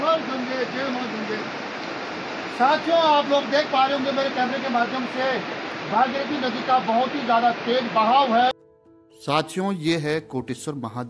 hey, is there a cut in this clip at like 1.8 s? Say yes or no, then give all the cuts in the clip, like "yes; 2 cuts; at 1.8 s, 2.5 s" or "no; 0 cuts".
no; 1 cut; at 8.7 s